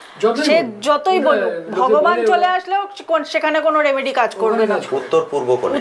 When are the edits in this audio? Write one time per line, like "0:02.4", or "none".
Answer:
none